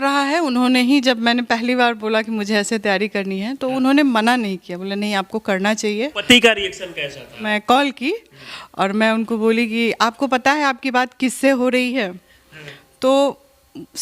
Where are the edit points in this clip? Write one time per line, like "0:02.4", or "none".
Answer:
0:06.2
0:07.5